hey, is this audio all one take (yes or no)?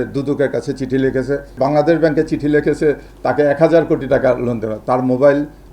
no